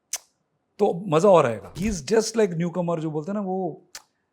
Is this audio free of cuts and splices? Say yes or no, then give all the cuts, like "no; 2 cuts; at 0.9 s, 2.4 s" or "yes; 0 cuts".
no; 1 cut; at 1.8 s